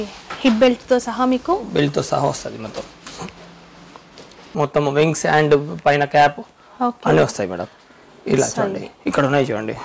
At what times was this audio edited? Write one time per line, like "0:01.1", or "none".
0:04.4